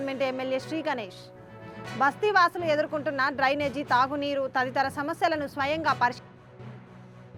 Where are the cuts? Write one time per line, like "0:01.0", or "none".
none